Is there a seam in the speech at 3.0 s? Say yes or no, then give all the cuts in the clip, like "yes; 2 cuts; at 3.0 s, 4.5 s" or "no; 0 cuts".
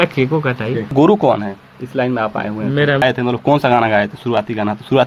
yes; 2 cuts; at 0.9 s, 3.0 s